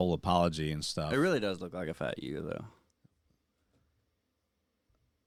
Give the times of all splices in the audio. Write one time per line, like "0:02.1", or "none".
none